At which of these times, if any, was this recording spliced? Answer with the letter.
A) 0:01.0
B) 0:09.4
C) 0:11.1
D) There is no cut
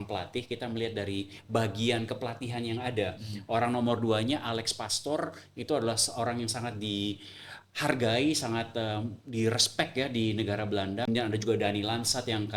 C